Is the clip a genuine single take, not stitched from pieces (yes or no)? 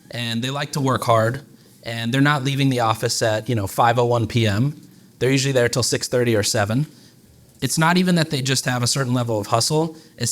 no